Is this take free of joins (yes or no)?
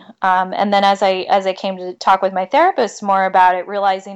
no